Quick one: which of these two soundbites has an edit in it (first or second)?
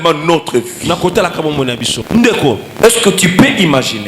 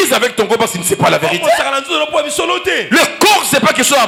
first